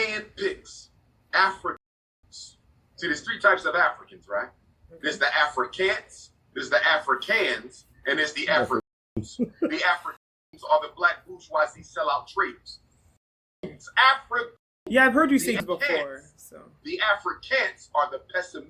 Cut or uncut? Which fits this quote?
uncut